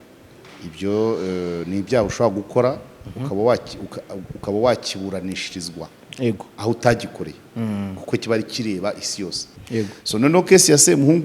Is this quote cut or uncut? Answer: cut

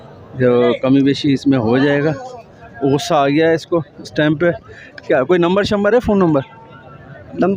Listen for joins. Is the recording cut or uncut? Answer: uncut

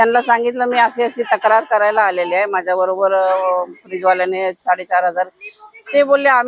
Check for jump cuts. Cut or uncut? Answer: uncut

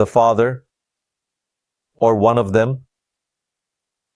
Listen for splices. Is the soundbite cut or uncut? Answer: uncut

